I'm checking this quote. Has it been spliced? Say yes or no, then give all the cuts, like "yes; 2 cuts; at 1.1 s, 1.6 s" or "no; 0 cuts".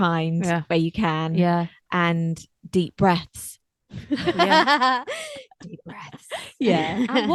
no; 0 cuts